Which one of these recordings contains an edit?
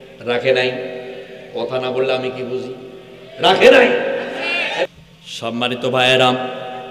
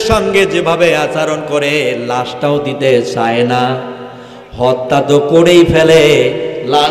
first; 1 cut; at 4.8 s

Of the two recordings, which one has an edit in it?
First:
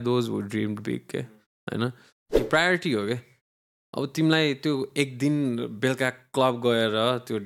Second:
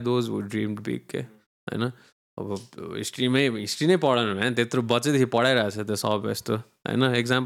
first; 1 cut; at 2.4 s

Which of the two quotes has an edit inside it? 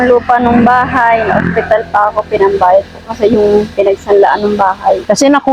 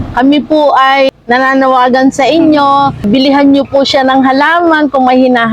second; 2 cuts; at 1.1 s, 3.0 s

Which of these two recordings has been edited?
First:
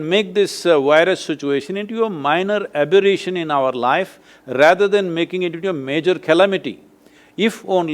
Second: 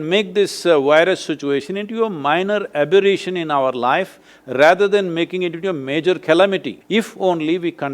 second; 1 cut; at 6.8 s

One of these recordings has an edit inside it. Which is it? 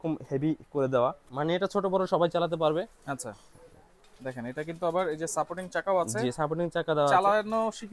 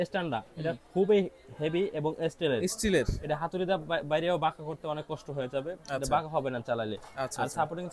first; 1 cut; at 1.2 s

